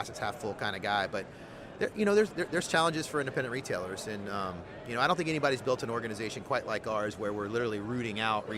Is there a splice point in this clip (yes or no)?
no